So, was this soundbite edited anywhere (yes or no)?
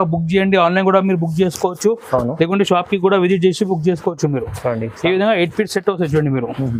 no